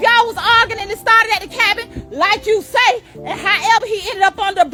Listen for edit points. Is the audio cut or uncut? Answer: uncut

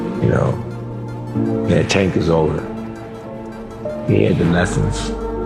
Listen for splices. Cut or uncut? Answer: uncut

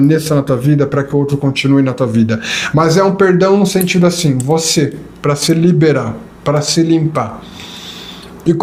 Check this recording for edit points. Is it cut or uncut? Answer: uncut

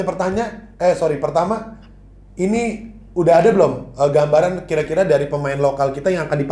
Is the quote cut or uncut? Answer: uncut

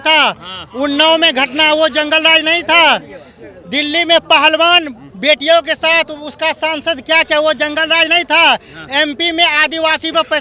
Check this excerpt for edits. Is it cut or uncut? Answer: uncut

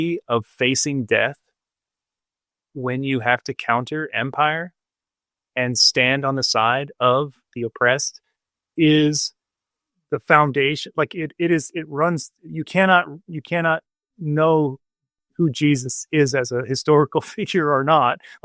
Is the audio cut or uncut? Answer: uncut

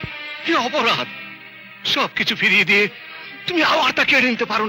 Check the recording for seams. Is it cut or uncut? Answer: uncut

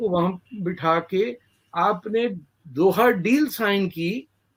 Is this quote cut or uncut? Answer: uncut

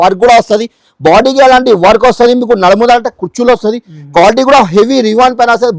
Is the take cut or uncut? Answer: uncut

